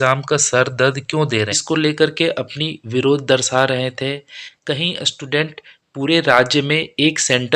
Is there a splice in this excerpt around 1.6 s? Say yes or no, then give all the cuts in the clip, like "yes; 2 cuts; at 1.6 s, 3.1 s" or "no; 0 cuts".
yes; 1 cut; at 1.6 s